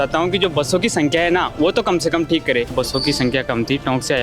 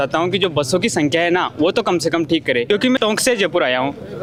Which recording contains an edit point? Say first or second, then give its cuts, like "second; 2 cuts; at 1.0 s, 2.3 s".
first; 1 cut; at 2.7 s